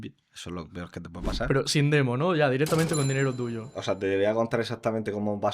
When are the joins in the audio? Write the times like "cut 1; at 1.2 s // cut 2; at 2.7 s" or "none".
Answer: cut 1; at 3.8 s